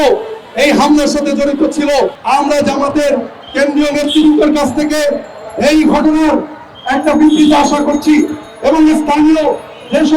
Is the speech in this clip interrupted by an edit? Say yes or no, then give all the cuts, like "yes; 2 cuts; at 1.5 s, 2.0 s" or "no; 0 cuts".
yes; 1 cut; at 2.2 s